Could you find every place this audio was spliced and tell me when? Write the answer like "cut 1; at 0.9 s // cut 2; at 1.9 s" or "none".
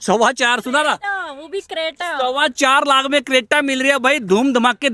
none